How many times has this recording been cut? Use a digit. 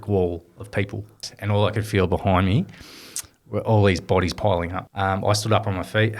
2